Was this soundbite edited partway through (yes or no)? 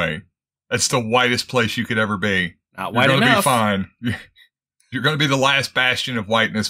no